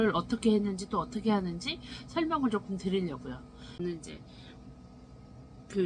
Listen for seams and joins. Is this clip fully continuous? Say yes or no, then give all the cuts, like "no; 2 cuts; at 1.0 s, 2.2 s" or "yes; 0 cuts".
no; 1 cut; at 3.7 s